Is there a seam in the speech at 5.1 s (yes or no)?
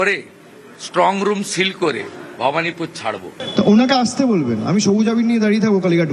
no